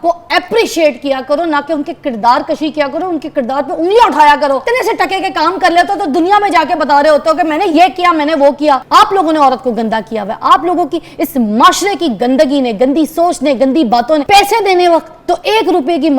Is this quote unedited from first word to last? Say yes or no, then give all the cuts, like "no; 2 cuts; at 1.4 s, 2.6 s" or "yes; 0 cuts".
no; 3 cuts; at 4.6 s, 8.8 s, 14.2 s